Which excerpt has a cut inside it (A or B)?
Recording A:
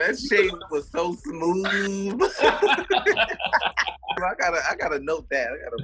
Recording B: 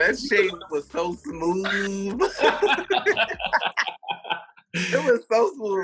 A